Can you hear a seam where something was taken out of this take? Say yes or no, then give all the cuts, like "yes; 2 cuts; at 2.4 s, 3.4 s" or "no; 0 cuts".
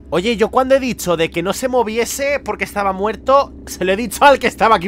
no; 0 cuts